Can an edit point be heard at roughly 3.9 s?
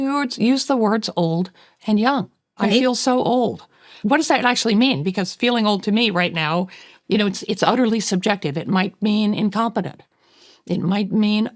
yes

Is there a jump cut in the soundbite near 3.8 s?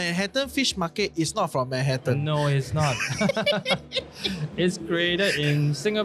no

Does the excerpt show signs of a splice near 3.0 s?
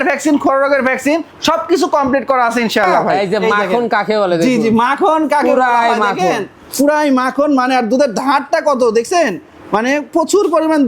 yes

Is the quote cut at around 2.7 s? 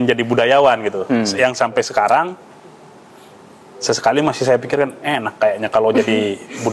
no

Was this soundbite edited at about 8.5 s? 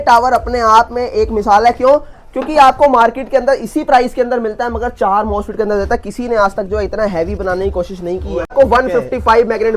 yes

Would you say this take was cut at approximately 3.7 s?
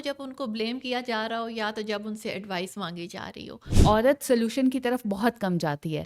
yes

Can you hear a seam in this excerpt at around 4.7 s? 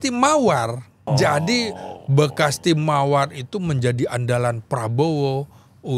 no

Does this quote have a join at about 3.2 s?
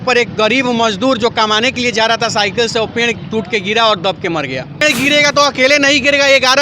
no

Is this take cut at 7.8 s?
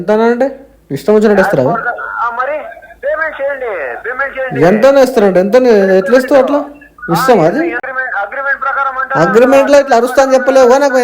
yes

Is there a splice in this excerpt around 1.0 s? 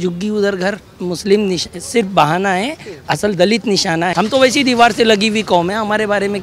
yes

